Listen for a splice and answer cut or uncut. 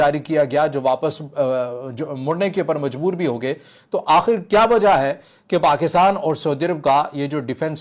uncut